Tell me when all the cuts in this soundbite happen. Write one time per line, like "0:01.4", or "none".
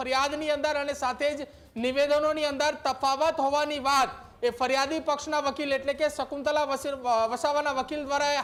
none